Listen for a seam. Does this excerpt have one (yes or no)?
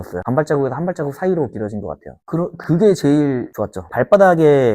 yes